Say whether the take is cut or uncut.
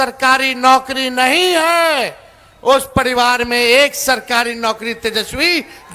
uncut